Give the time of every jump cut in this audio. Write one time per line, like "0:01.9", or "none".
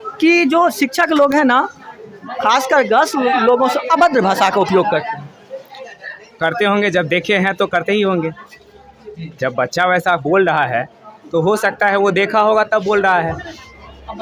none